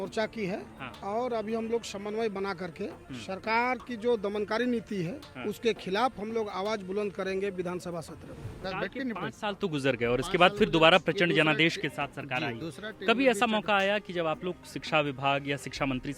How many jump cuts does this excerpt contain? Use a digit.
1